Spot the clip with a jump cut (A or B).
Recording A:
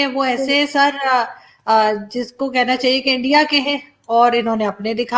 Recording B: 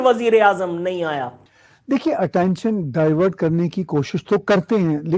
B